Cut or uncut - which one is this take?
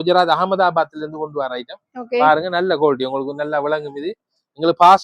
uncut